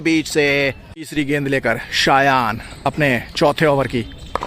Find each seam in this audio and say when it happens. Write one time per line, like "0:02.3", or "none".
0:00.9